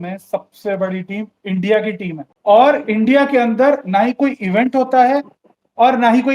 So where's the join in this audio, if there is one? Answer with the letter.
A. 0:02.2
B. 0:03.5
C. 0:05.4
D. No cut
A